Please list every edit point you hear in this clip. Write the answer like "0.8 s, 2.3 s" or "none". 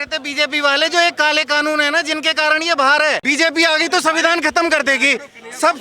3.2 s